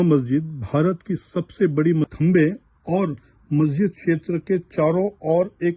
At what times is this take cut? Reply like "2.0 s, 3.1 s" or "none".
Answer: 2.0 s